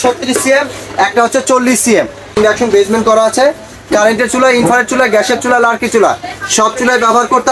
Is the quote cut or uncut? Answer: cut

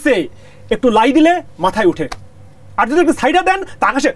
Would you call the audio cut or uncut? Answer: uncut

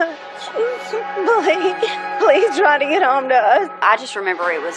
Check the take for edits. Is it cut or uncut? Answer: cut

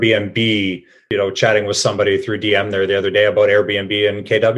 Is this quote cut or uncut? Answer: cut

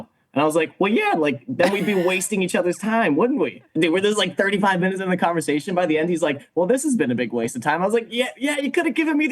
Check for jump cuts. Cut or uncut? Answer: cut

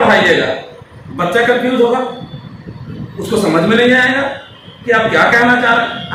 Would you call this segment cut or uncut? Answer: uncut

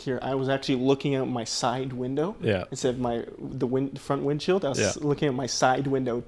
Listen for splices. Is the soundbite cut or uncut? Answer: uncut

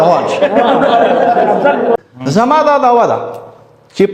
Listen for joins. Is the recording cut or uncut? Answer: cut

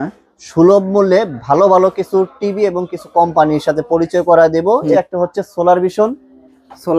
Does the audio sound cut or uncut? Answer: cut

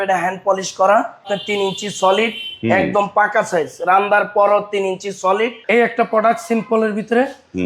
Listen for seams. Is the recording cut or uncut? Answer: cut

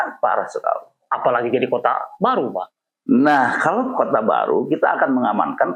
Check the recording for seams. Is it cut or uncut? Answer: uncut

